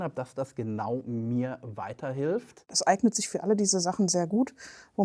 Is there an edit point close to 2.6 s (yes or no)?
yes